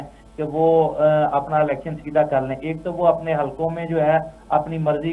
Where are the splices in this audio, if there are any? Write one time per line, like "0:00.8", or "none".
none